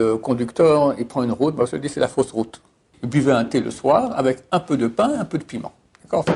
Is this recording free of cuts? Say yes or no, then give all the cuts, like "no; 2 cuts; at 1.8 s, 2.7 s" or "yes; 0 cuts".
no; 1 cut; at 3.0 s